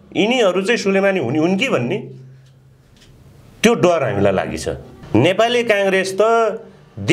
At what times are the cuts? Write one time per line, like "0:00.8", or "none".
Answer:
0:05.0